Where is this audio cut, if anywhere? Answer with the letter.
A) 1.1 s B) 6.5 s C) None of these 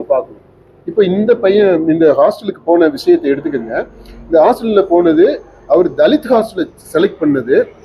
C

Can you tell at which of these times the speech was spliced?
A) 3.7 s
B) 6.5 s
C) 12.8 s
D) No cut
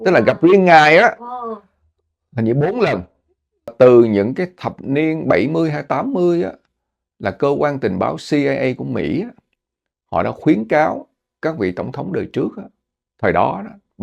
A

